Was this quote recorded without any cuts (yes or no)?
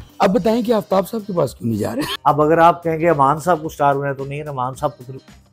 no